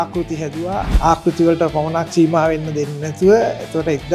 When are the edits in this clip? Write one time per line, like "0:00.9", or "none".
0:00.9